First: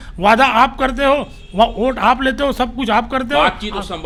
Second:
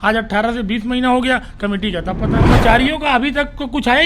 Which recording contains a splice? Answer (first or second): second